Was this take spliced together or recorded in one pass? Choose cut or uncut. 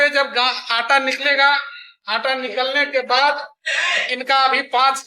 uncut